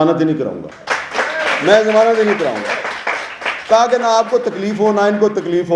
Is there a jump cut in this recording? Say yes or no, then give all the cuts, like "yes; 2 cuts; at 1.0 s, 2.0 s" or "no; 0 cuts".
no; 0 cuts